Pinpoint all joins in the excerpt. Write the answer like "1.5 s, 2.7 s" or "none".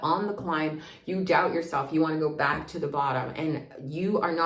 none